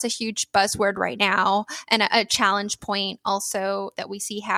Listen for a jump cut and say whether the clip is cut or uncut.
uncut